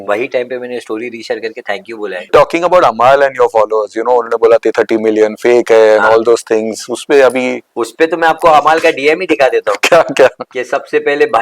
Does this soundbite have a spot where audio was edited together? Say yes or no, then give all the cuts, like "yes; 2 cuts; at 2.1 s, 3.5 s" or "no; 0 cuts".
yes; 1 cut; at 2.3 s